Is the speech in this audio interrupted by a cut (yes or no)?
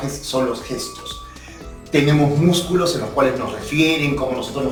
no